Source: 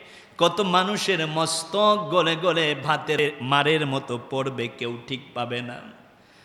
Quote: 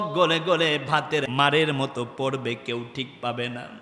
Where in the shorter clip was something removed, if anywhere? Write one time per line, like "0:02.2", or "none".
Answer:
0:01.2